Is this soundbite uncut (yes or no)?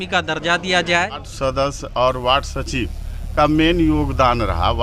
no